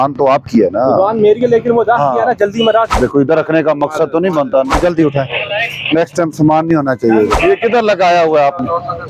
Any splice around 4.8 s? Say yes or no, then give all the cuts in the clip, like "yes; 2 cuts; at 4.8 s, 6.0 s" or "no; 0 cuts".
yes; 3 cuts; at 2.9 s, 4.8 s, 7.4 s